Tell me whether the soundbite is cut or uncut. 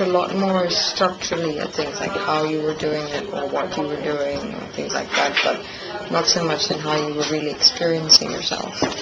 cut